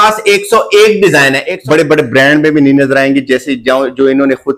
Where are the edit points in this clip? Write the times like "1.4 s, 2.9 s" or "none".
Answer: 1.4 s